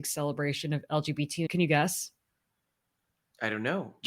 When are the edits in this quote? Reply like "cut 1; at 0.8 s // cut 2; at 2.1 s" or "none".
cut 1; at 1.5 s